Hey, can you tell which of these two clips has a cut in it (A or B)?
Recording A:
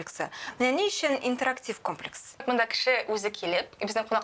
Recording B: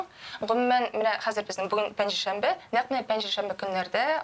A